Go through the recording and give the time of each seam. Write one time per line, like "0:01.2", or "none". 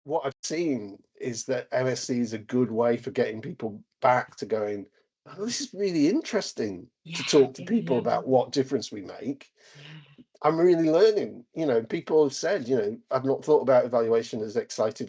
none